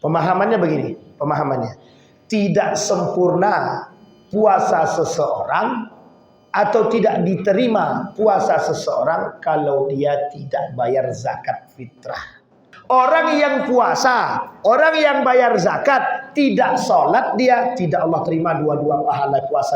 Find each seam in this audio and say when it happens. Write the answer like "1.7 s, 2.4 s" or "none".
12.7 s